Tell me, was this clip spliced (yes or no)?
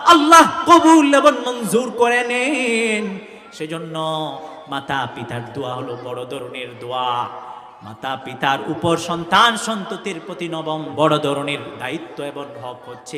no